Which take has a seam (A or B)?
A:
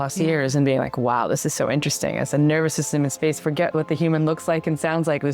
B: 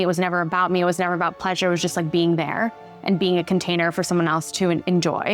A